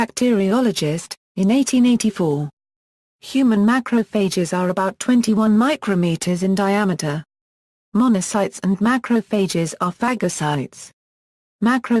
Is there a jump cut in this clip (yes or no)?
yes